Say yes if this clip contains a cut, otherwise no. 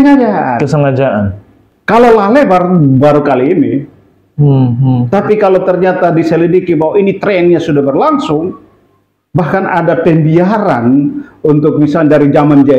no